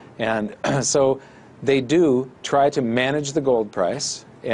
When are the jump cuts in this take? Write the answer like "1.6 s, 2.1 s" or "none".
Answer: none